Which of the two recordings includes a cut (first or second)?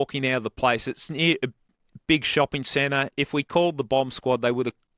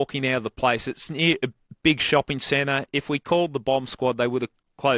second